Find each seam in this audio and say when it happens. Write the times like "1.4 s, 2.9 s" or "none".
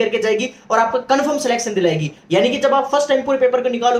2.1 s